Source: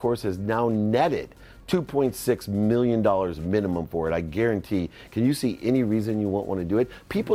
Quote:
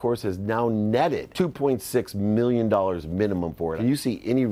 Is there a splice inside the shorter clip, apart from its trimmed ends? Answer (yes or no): yes